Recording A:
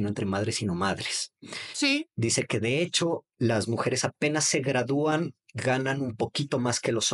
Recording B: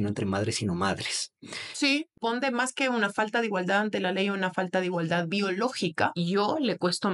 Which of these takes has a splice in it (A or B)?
B